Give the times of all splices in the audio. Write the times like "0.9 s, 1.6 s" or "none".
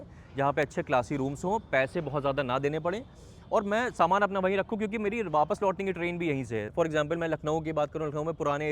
6.7 s